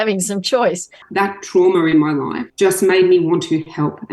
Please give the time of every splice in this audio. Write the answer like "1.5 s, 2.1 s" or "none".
1.0 s, 2.4 s

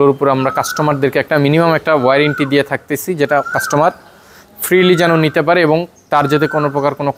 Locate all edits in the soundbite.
none

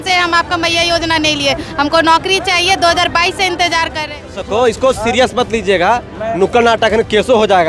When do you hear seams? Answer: 4.4 s

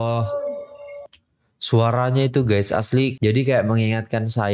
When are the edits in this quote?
3.2 s

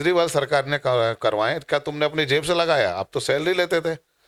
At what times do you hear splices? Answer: none

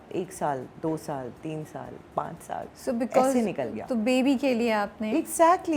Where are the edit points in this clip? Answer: none

